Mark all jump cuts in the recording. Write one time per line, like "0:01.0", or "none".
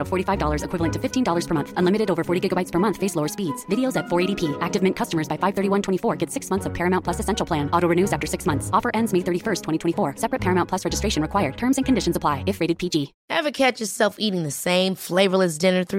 0:13.2